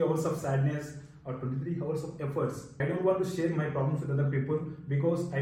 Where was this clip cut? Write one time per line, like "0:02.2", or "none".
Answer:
0:02.7